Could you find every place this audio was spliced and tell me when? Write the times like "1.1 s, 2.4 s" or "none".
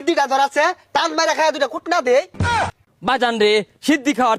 2.6 s

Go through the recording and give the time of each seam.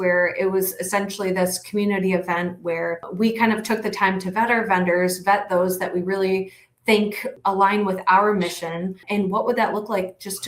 3.1 s, 7.3 s, 9.0 s

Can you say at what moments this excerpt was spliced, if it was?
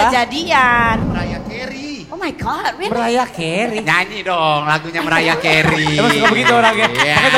1.1 s

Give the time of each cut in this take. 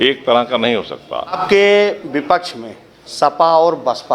1.4 s

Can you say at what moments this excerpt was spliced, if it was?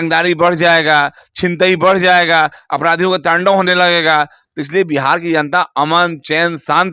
none

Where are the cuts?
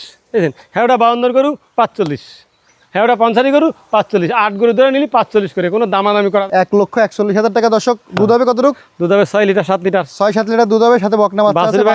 6.4 s

